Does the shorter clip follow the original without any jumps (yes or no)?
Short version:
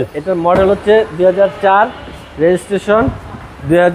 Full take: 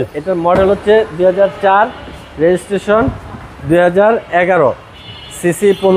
yes